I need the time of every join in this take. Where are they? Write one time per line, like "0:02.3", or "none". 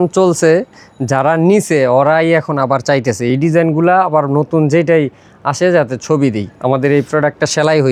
none